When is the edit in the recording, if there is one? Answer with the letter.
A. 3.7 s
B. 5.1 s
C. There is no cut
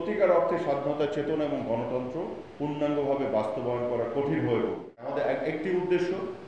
B